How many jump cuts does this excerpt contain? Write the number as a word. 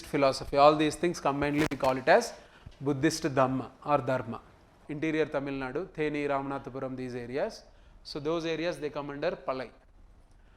one